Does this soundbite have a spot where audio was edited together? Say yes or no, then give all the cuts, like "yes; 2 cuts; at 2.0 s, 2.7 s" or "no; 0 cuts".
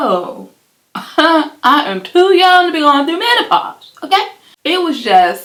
no; 0 cuts